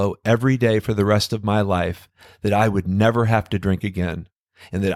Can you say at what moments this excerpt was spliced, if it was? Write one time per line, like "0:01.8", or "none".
none